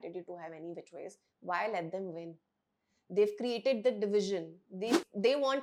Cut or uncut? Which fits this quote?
uncut